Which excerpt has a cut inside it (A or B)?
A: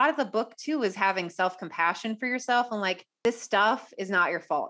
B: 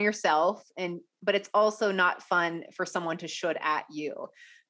A